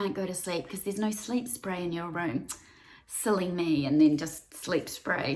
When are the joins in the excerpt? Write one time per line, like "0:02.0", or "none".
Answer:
0:04.5